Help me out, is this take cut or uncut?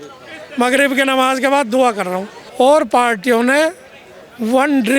cut